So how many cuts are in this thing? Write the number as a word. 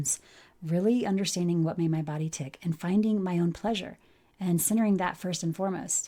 zero